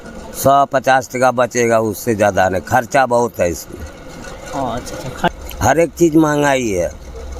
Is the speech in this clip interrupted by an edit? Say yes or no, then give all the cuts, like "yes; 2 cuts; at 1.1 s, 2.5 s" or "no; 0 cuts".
yes; 1 cut; at 5.3 s